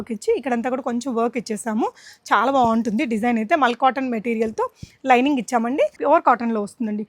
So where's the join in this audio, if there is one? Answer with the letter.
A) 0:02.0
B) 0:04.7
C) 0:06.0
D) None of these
C